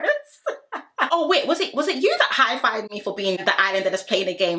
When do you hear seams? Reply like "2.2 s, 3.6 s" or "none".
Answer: 1.1 s, 3.4 s